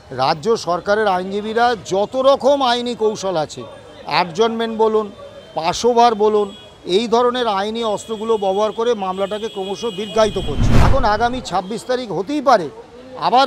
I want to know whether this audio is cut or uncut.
cut